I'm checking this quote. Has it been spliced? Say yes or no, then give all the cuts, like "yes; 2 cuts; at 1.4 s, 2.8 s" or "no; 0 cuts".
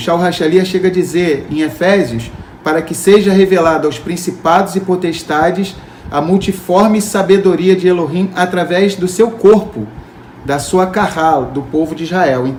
no; 0 cuts